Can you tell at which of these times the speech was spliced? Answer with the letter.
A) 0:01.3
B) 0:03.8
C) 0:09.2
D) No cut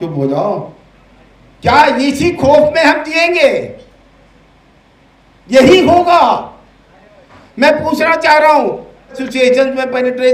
C